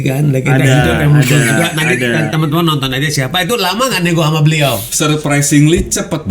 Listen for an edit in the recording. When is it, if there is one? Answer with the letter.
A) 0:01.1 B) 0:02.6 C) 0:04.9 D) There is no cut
C